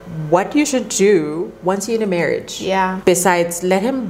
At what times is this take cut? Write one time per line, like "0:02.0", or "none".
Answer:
none